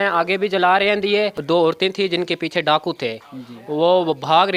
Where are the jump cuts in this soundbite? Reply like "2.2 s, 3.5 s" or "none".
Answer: 1.4 s